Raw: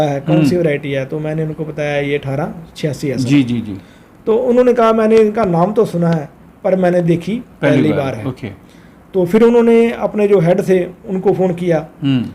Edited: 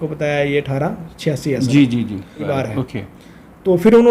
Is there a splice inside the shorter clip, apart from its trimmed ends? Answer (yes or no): yes